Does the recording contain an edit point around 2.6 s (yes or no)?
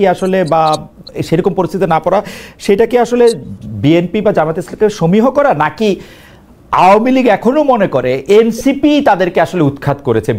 no